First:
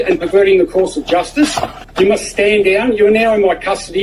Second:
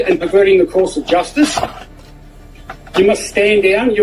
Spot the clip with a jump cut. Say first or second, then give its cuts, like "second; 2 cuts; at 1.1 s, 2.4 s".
first; 1 cut; at 1.8 s